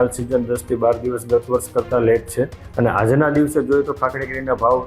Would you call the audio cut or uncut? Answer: cut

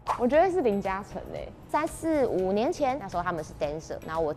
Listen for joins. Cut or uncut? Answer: cut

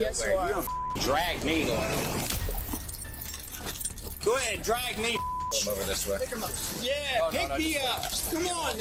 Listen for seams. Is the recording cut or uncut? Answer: uncut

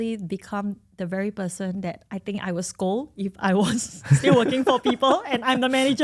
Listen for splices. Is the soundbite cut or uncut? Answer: uncut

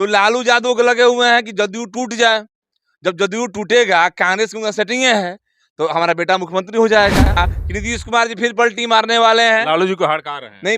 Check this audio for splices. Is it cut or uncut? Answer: cut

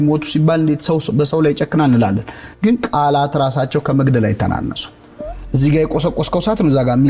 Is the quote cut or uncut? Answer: uncut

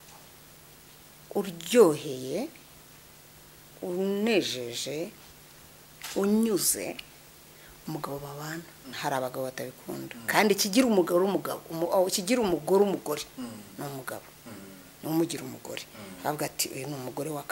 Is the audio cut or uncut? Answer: cut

